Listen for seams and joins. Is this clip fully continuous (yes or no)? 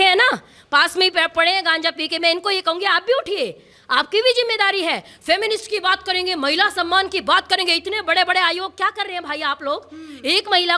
yes